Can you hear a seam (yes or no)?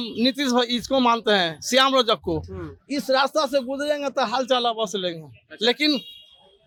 no